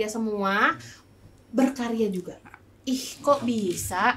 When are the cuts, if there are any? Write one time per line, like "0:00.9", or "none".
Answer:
none

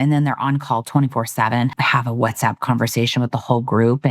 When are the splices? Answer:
0:01.7

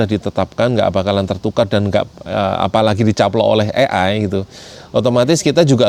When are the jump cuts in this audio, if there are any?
none

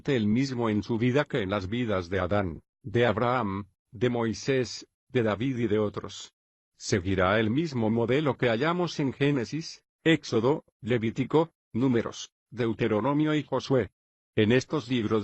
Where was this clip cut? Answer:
0:02.8

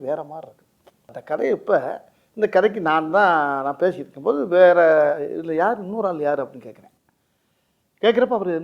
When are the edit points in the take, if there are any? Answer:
0:01.2

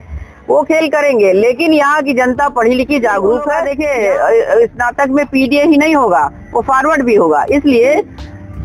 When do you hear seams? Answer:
0:03.7

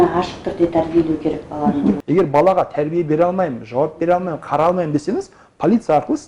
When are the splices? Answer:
0:02.0

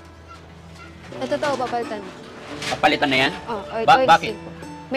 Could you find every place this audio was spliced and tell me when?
none

